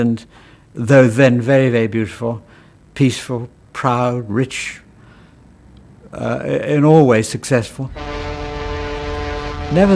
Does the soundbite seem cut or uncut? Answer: uncut